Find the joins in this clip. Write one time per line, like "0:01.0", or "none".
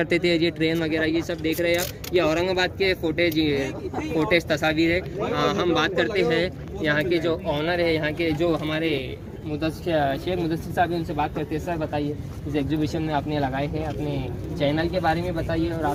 none